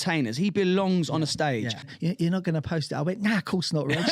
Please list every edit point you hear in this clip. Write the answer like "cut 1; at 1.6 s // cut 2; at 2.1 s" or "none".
cut 1; at 1.8 s